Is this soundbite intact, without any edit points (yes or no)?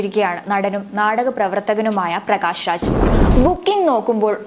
no